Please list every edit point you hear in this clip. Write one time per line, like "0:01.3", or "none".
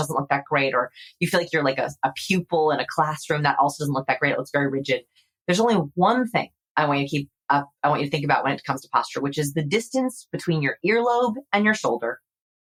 none